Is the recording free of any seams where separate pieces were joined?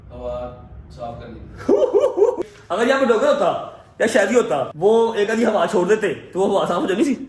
no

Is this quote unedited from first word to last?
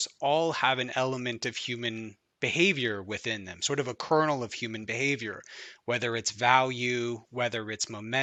yes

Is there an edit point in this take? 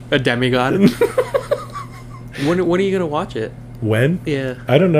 no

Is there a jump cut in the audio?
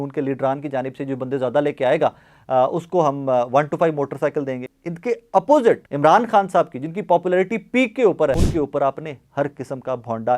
yes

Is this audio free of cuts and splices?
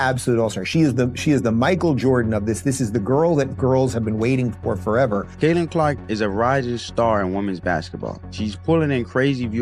no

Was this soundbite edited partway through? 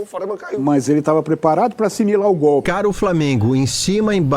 yes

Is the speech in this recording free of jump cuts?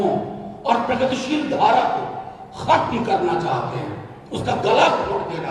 yes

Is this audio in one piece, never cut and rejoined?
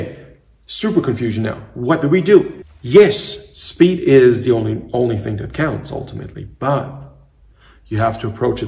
no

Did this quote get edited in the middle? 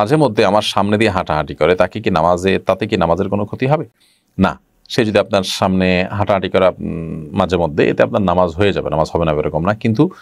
no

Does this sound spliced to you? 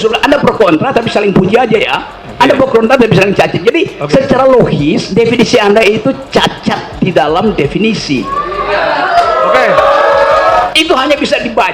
yes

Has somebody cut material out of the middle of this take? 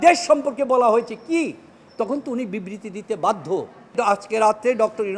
yes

